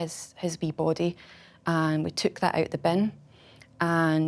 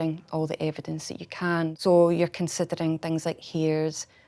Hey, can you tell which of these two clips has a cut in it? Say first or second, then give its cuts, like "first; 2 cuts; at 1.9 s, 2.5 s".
second; 1 cut; at 1.8 s